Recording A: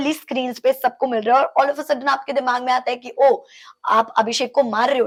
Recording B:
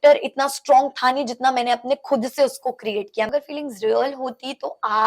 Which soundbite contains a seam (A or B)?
B